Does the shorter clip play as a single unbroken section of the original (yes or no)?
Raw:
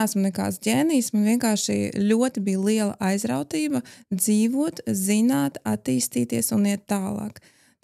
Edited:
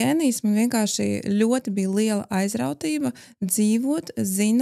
yes